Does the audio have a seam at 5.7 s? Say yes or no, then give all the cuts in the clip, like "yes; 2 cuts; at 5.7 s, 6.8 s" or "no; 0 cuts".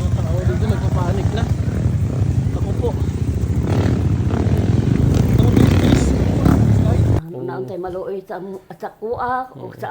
no; 1 cut; at 7.2 s